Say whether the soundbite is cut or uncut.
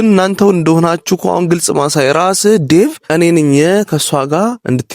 cut